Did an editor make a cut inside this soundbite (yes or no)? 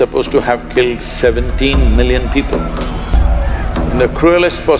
yes